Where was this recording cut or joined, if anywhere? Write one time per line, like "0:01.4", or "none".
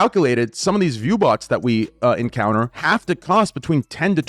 0:02.8